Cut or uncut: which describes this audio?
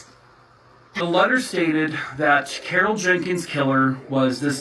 cut